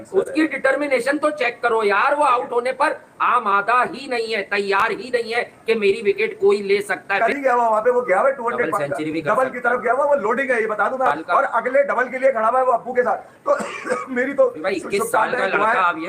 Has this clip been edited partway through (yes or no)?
no